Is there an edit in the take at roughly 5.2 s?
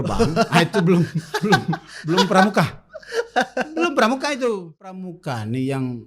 yes; 1 cut; at 5.2 s

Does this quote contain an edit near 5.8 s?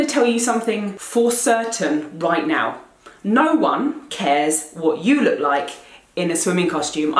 no; 1 cut; at 0.9 s

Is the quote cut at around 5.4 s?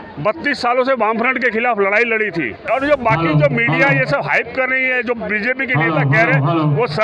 no; 1 cut; at 2.6 s

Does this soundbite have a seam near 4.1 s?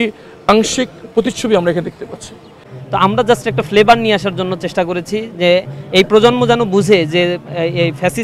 no; 1 cut; at 2.9 s

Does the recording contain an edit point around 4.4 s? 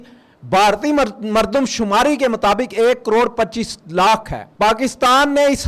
yes; 1 cut; at 4.4 s

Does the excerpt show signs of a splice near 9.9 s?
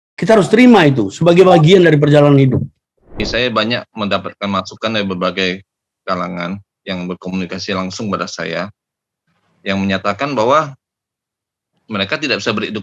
no; 1 cut; at 3.2 s

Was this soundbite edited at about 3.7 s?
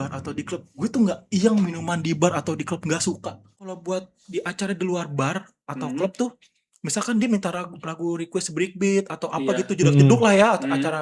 yes; 1 cut; at 3.7 s

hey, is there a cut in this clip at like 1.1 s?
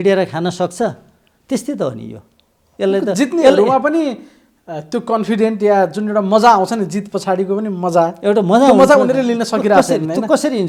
no; 0 cuts

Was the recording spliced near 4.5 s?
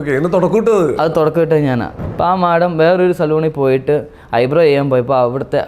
no; 1 cut; at 2.0 s

